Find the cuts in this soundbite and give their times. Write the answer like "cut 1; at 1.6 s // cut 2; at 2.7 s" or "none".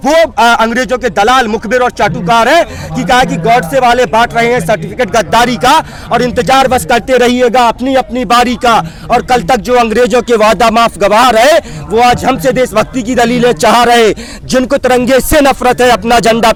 none